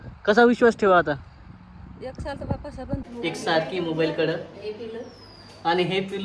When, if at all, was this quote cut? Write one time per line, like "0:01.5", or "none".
0:03.0